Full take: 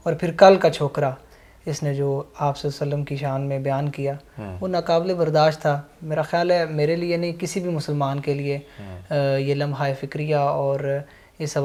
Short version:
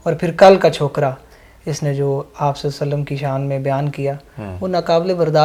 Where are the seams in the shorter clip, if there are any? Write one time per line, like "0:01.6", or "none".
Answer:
none